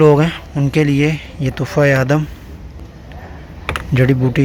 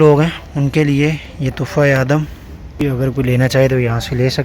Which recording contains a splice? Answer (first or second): second